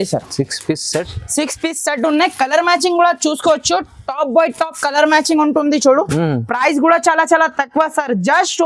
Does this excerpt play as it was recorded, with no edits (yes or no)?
yes